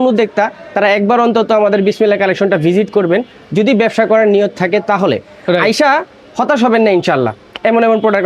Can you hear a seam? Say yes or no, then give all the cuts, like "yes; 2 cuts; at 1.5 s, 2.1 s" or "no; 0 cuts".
no; 0 cuts